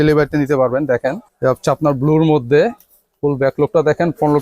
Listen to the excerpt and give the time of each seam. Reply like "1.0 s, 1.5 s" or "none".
1.3 s

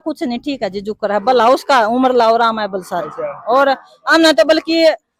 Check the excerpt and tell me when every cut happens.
none

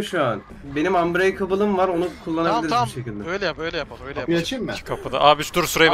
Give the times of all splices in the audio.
none

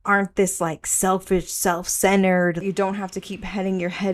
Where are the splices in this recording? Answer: 2.6 s

